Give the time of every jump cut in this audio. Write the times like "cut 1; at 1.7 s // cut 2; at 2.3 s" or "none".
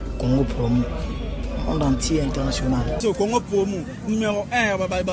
cut 1; at 3.0 s